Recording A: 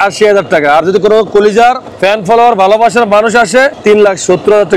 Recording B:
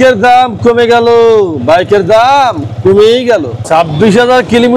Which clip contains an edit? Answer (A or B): B